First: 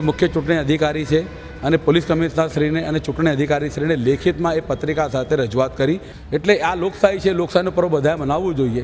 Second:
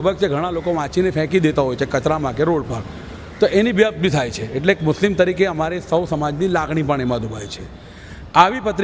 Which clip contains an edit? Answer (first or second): first